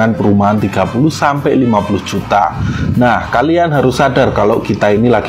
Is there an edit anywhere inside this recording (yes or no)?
no